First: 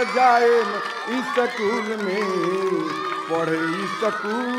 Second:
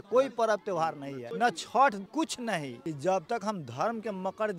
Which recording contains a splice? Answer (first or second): second